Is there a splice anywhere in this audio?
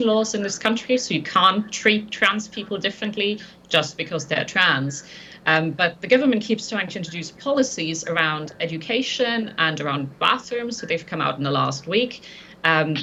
no; 0 cuts

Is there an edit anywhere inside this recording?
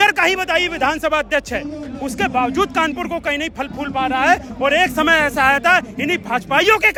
no; 0 cuts

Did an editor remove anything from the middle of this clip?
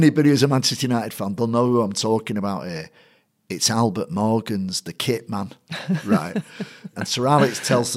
yes; 1 cut; at 6.9 s

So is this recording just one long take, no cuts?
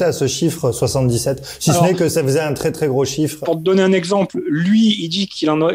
no; 1 cut; at 3.4 s

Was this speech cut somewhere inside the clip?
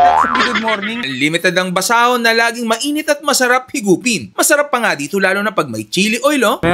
no; 0 cuts

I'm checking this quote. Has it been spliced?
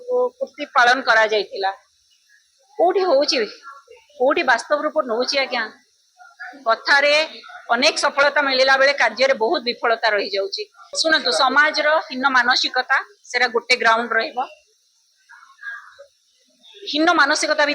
yes; 1 cut; at 10.9 s

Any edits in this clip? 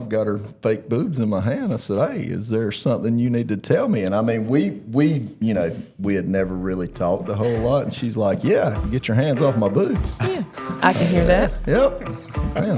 no; 0 cuts

